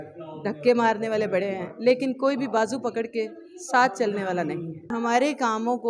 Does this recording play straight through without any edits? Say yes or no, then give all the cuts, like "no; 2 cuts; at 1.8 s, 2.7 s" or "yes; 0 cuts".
no; 1 cut; at 4.9 s